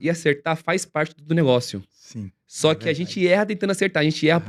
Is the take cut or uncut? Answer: uncut